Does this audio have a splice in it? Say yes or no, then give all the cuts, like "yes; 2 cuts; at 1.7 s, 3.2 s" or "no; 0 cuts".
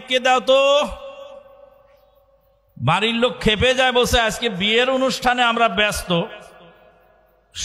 no; 0 cuts